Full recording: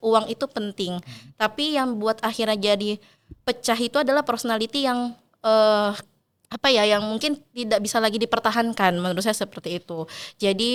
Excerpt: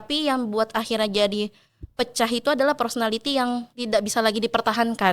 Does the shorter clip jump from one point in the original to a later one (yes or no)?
yes